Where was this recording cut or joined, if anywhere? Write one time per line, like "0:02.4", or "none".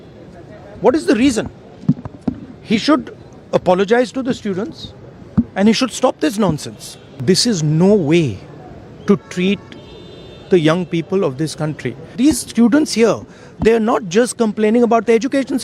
0:07.1
0:12.1

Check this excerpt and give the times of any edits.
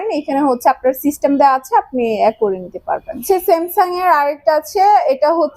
0:03.2

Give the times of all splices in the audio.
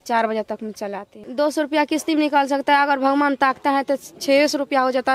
0:01.2

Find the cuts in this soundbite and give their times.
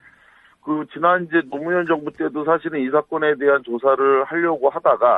none

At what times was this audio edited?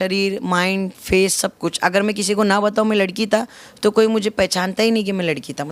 none

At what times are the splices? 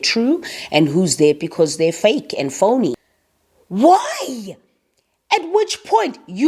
0:03.1

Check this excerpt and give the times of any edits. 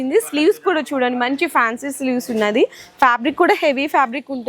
none

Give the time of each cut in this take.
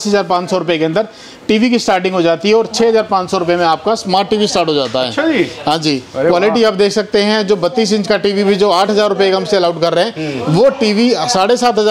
none

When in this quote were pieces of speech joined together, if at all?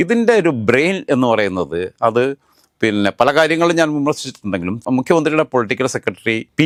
none

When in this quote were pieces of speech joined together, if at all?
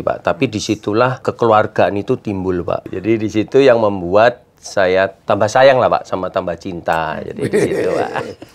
0:01.3
0:02.9
0:05.2

